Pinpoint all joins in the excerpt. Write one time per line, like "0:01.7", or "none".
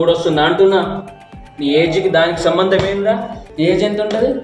0:03.4

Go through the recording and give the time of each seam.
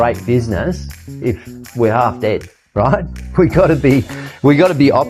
none

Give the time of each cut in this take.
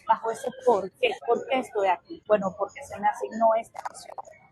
0:01.2
0:02.1

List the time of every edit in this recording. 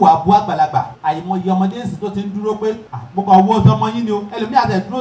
0:00.9
0:02.9

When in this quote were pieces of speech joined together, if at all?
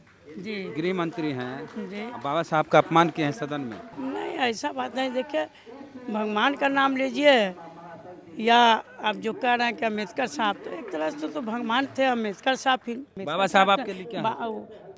0:03.8
0:13.1

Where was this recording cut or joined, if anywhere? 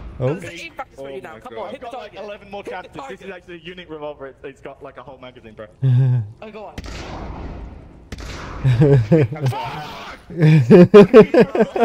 none

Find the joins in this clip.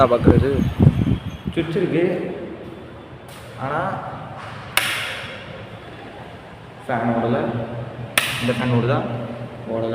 0:01.3

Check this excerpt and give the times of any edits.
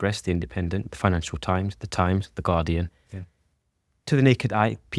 none

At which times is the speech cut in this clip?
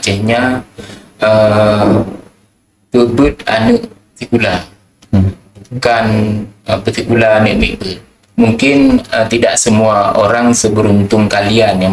0:08.2

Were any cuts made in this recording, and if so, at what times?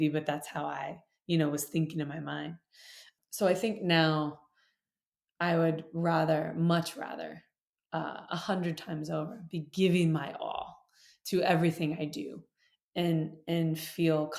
0:03.1

